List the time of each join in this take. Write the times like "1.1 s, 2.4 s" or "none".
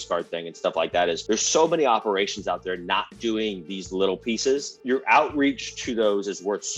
1.2 s, 4.7 s